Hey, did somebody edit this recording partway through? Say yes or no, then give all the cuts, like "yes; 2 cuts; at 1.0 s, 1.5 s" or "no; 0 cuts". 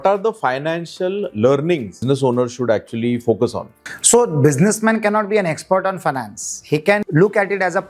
yes; 2 cuts; at 2.0 s, 7.0 s